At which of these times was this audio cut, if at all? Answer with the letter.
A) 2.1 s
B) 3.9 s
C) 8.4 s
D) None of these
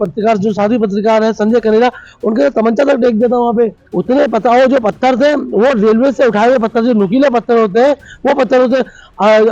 B